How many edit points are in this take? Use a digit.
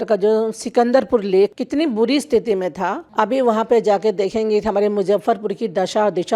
2